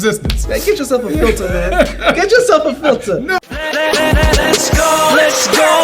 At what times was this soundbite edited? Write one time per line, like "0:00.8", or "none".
0:03.5